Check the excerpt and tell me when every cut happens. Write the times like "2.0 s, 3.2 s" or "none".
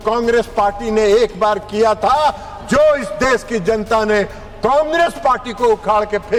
none